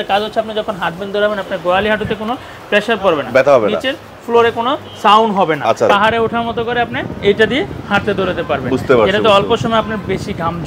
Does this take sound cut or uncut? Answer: cut